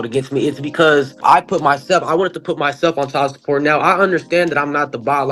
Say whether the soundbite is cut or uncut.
cut